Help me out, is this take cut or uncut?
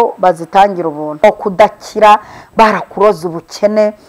cut